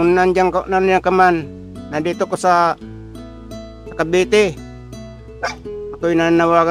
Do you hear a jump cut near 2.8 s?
no; 0 cuts

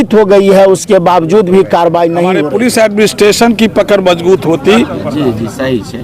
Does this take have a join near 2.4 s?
yes; 1 cut; at 2.4 s

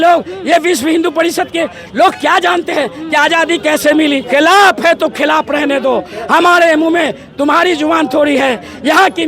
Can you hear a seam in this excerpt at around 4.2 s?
yes; 1 cut; at 4.2 s

